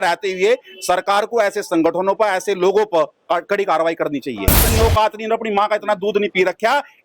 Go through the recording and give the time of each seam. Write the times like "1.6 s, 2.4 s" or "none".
4.6 s